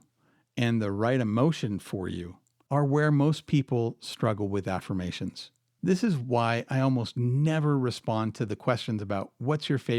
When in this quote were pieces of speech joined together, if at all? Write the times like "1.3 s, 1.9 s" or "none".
9.0 s